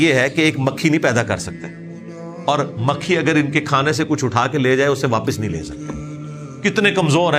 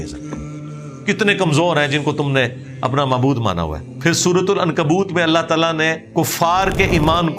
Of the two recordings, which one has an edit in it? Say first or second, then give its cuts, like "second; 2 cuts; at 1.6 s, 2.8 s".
second; 2 cuts; at 3.9 s, 6.0 s